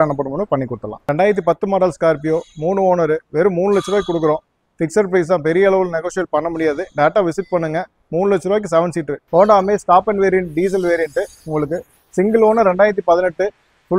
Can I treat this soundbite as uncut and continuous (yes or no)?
no